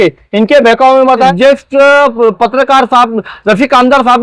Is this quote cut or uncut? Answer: cut